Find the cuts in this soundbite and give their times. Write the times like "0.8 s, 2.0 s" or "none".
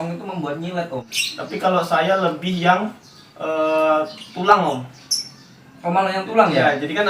1.2 s